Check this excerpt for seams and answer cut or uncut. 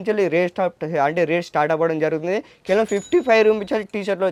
uncut